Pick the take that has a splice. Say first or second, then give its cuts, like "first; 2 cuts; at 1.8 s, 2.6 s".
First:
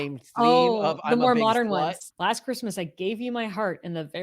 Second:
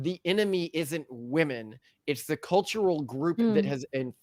first; 1 cut; at 2.1 s